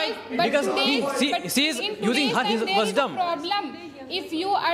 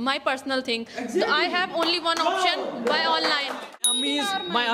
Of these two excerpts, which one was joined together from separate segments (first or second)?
second